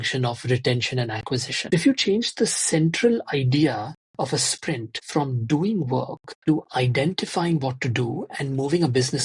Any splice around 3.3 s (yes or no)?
no